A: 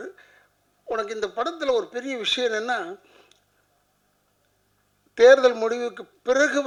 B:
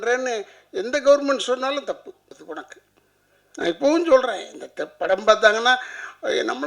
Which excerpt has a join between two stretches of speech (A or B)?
B